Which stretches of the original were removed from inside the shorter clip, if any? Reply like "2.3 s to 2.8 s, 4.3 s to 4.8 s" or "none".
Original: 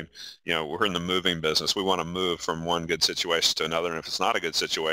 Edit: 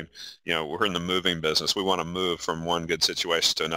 none